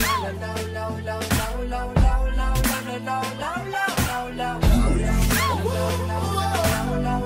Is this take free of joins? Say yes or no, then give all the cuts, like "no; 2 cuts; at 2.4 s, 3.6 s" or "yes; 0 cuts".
yes; 0 cuts